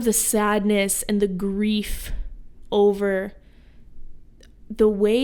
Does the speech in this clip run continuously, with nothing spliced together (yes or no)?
yes